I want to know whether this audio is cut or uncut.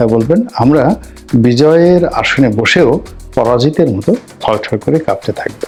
uncut